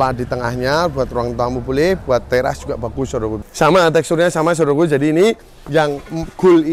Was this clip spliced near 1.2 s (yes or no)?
no